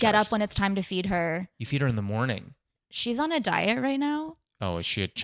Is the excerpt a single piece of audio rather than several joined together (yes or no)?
no